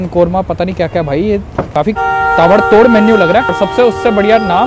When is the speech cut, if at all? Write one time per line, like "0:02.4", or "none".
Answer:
0:01.6
0:03.5